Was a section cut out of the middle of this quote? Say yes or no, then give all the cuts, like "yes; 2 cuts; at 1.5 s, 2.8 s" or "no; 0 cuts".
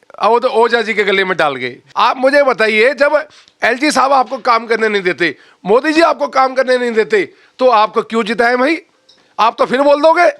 yes; 1 cut; at 1.8 s